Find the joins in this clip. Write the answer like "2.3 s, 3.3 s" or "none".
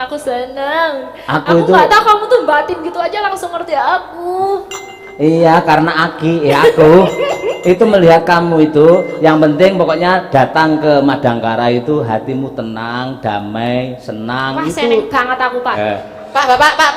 15.7 s